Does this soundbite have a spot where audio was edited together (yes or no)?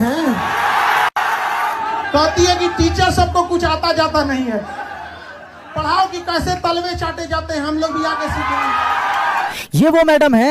yes